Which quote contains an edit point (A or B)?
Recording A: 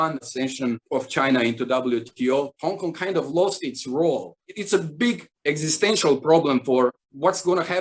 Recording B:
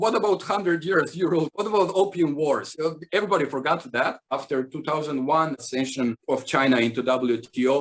B